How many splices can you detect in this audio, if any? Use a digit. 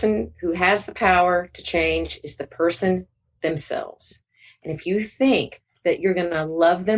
1